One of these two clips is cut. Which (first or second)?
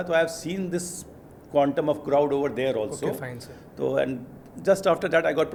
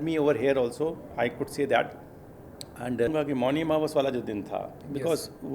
second